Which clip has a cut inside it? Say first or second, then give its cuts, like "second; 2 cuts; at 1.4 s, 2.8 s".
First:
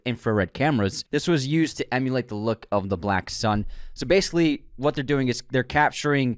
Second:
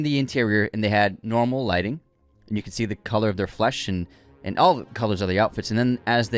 first; 1 cut; at 1.0 s